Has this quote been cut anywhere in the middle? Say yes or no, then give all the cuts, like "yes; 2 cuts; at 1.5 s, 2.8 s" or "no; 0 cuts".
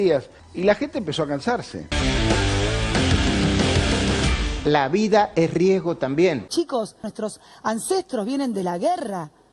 yes; 2 cuts; at 1.8 s, 4.4 s